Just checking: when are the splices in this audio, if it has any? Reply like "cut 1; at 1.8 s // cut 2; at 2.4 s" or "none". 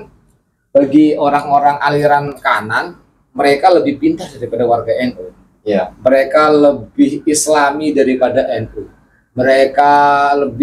none